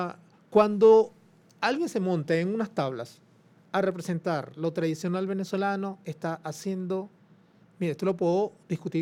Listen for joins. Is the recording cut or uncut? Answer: uncut